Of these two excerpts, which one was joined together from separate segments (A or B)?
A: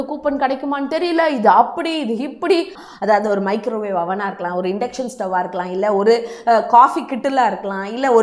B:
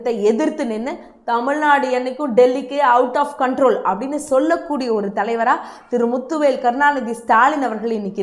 A